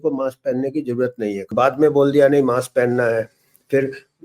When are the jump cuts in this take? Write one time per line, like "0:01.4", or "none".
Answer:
0:01.5